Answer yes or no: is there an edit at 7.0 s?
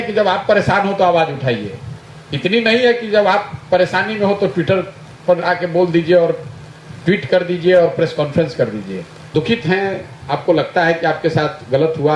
no